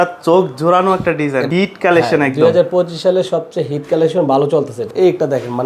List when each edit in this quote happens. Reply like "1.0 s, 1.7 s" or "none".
1.5 s, 4.9 s

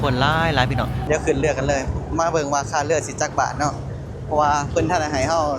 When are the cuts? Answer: 1.0 s

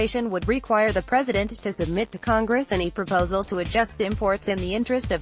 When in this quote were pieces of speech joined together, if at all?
none

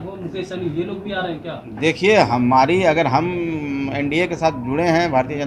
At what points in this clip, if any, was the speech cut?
none

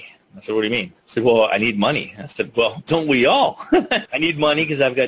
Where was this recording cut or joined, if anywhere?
1.0 s, 4.0 s

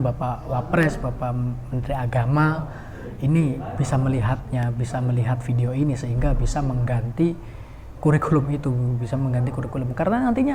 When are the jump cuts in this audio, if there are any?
none

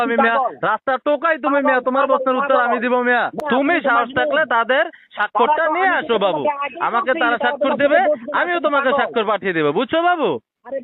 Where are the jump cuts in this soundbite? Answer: 3.4 s

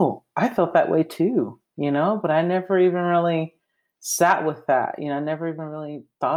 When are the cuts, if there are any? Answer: none

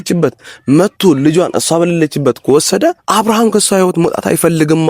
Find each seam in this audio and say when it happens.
3.0 s

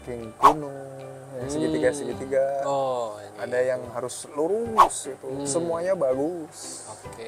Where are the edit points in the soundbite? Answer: none

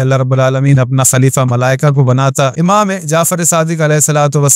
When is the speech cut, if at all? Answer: 2.4 s

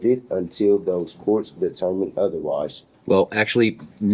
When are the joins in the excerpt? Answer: 2.9 s

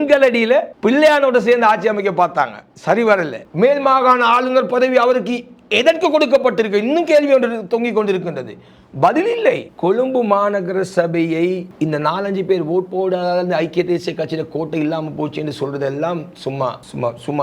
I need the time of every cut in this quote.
3.4 s, 9.6 s

